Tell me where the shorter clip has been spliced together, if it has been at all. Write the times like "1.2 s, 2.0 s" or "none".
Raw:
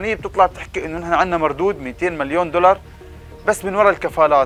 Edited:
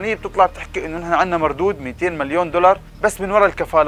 2.9 s